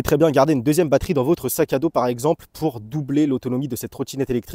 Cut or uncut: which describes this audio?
uncut